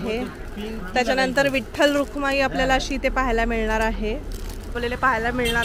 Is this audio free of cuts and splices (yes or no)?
no